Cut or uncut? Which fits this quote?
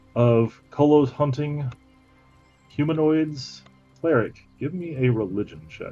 cut